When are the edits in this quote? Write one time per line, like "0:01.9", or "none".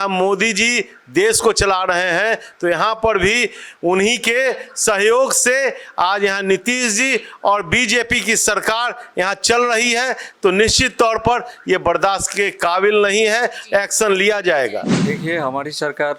0:14.9